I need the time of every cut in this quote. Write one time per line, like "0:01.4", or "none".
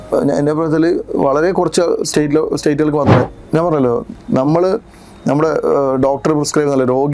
0:03.3